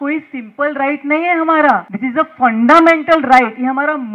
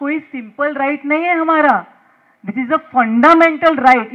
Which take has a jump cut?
first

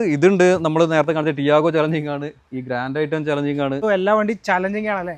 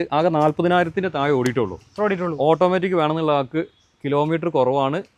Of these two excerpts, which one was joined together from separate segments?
first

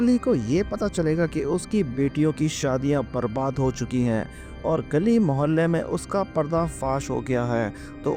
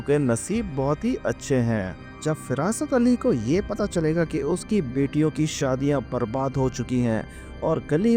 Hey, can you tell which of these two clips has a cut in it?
second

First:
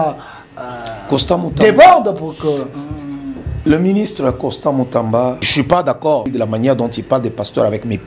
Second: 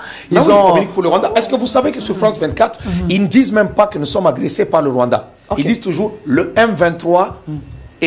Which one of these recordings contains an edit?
first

